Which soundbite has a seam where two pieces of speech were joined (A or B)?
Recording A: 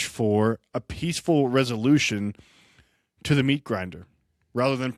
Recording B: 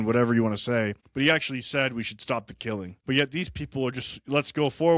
B